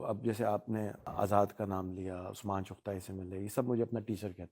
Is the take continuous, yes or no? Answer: no